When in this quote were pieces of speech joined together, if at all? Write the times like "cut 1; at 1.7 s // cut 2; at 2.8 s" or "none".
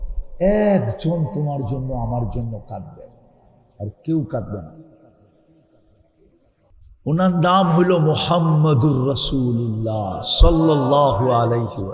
cut 1; at 6.9 s